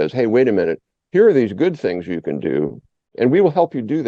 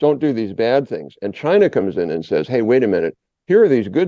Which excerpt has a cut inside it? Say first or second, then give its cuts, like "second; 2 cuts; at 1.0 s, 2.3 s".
first; 1 cut; at 3.2 s